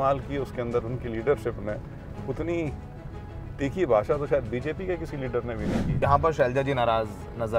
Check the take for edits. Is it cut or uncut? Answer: cut